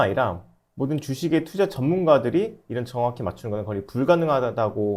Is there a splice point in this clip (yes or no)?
no